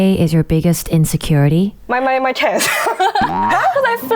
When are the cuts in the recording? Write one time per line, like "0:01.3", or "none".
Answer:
0:01.8

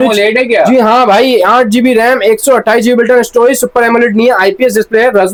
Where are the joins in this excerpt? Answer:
none

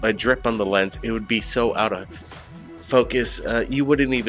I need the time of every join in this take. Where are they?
0:03.1

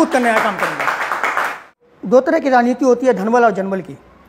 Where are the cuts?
0:01.8

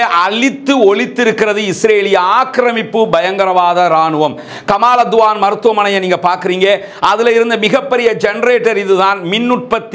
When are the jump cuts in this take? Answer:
none

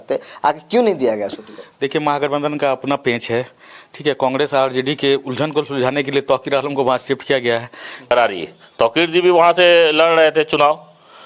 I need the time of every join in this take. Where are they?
0:08.1

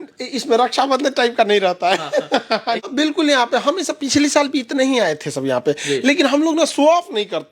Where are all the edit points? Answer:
0:02.8

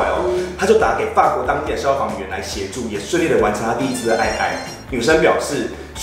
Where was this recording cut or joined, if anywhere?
none

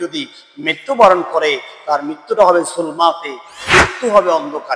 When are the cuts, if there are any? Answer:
none

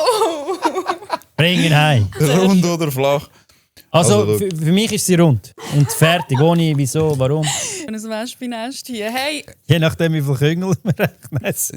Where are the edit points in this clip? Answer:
0:02.2
0:05.5
0:07.9
0:09.5

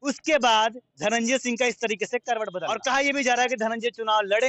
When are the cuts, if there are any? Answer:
0:02.6

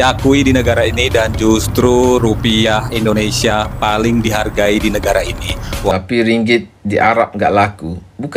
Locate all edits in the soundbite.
0:05.9

